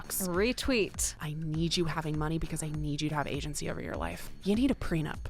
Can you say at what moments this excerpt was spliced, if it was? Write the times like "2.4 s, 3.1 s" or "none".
1.2 s, 4.3 s